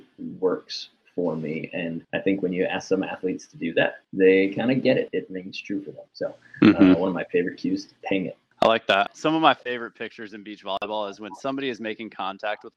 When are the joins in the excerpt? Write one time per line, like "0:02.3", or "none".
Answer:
0:09.1